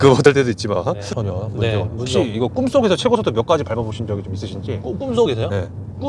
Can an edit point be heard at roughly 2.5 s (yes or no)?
no